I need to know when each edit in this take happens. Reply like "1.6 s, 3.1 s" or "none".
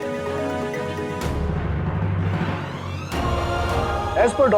3.7 s